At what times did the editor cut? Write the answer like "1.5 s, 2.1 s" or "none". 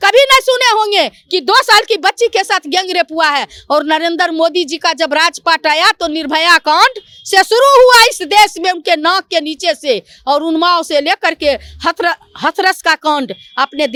none

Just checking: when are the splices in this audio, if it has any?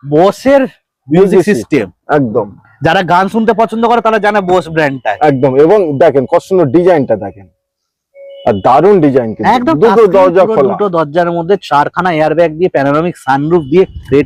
none

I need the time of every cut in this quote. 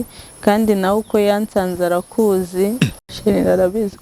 3.0 s

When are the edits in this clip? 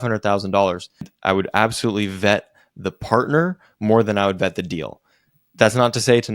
1.1 s

